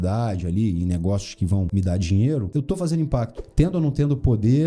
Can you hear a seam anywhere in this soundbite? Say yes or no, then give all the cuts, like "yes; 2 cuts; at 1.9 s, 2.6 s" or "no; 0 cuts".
yes; 3 cuts; at 1.7 s, 2.5 s, 3.4 s